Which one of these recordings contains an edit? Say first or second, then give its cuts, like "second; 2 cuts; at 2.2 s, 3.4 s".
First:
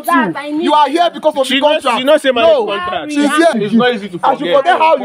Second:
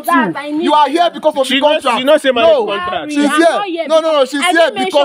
first; 1 cut; at 3.6 s